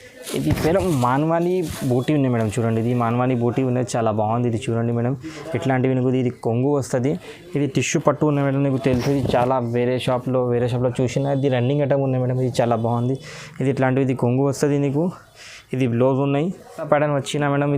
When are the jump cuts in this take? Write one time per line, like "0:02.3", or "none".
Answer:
0:07.0
0:16.8

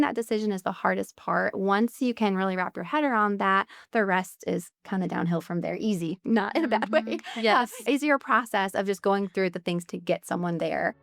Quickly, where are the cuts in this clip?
0:07.8

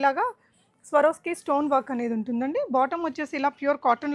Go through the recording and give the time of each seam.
none

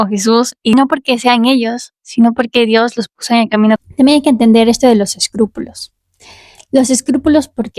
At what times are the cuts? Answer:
0:00.7
0:03.8

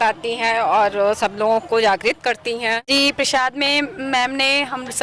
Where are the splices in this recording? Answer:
0:02.9

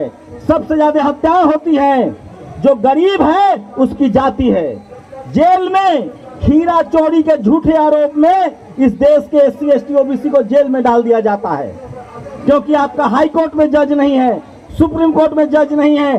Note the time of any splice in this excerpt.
none

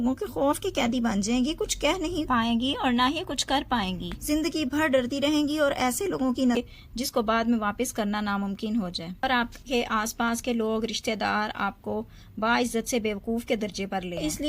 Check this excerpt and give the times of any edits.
0:06.6

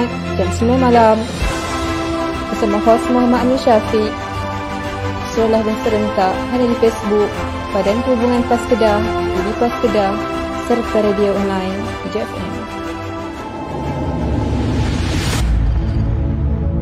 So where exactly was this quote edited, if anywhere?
none

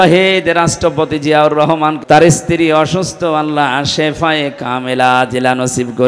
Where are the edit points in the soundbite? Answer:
0:02.0

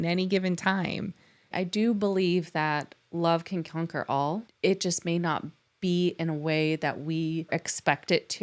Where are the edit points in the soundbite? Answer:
0:01.5
0:04.5
0:07.5

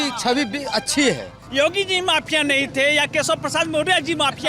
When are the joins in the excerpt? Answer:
0:01.4

